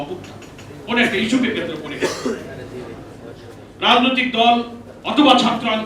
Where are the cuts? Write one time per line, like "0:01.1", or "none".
none